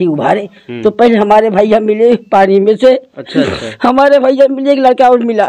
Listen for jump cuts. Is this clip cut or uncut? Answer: uncut